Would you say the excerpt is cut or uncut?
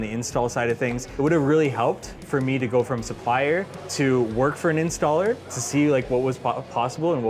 cut